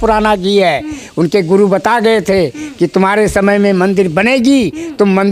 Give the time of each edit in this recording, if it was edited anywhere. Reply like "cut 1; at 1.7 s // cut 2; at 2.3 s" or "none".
none

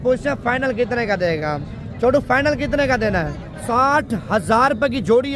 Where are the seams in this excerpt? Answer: cut 1; at 3.5 s

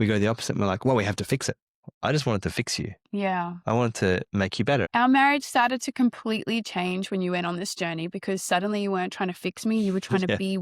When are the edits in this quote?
cut 1; at 1.8 s // cut 2; at 4.9 s

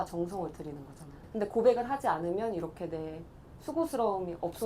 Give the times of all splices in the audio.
none

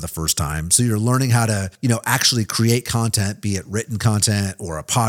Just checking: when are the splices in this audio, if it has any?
cut 1; at 1.7 s

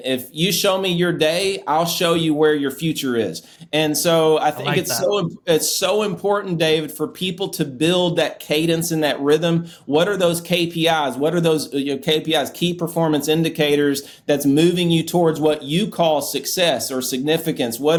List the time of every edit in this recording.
none

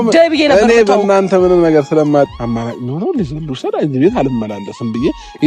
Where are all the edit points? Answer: cut 1; at 2.3 s

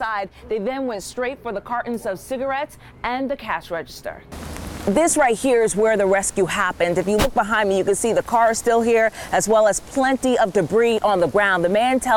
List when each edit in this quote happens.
cut 1; at 4.2 s

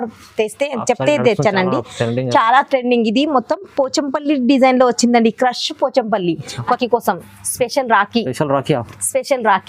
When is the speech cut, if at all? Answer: cut 1; at 6.7 s

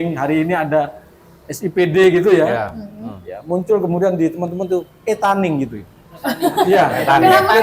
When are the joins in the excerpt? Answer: none

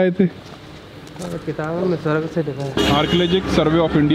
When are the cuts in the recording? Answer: cut 1; at 2.8 s

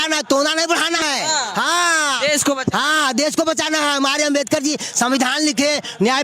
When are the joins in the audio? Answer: cut 1; at 1.0 s

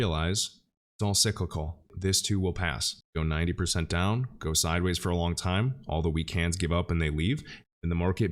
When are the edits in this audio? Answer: none

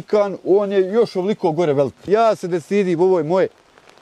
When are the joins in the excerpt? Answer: cut 1; at 2.1 s

